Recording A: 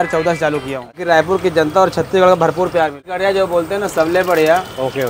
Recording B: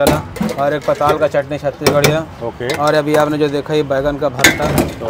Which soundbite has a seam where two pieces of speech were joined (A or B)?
A